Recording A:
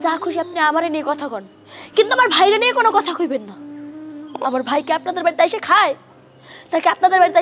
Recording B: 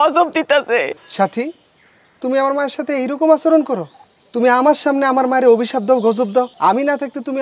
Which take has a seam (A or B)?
B